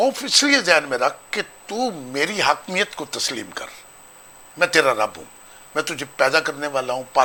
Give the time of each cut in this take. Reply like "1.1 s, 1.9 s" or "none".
none